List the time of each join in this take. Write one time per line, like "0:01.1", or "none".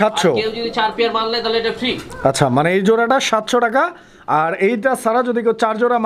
none